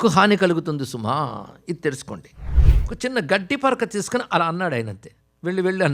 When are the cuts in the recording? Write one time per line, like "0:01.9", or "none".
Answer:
0:02.7